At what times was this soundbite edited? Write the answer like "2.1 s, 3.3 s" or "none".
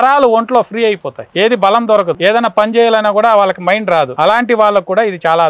1.2 s, 2.2 s, 4.1 s